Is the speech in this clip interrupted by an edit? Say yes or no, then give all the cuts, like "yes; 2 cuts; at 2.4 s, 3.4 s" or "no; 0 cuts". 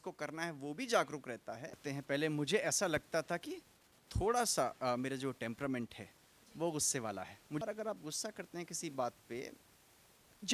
yes; 2 cuts; at 1.8 s, 7.6 s